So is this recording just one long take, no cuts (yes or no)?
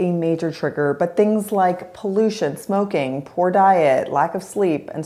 yes